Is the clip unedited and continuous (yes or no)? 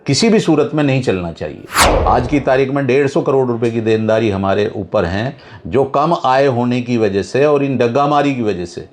no